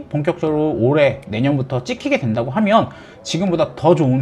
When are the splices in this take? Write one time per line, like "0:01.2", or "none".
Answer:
none